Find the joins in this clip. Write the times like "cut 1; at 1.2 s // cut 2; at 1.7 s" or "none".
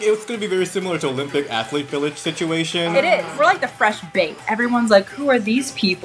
cut 1; at 3.3 s